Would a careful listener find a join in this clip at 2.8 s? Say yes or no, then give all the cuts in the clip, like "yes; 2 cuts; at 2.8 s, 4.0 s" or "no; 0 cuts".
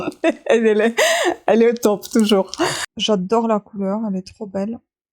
yes; 1 cut; at 2.8 s